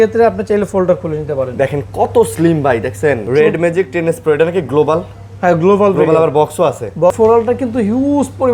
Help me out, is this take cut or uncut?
cut